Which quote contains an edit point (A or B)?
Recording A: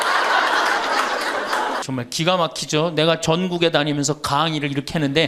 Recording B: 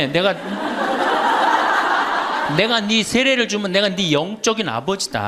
A